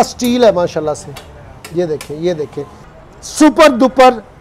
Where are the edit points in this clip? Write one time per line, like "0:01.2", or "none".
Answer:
0:02.9